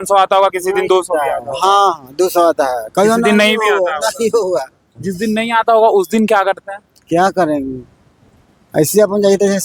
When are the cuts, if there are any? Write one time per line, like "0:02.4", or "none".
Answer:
none